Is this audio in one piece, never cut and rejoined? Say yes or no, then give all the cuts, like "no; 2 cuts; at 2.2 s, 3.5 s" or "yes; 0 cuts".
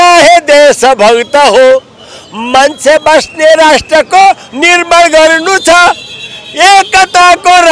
yes; 0 cuts